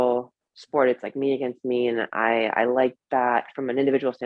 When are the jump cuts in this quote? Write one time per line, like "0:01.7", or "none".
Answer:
none